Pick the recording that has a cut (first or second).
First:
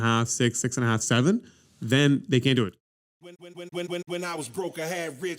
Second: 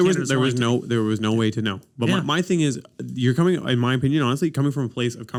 first